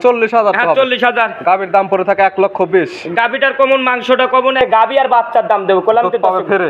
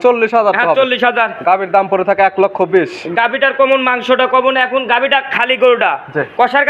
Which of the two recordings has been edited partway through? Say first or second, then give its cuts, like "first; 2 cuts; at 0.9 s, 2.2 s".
first; 1 cut; at 4.6 s